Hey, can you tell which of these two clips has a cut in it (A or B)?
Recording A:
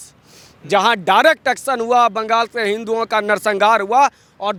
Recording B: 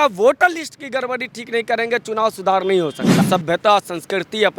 B